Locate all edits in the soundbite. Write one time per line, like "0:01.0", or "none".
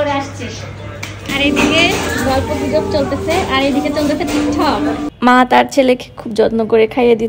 0:01.3
0:05.1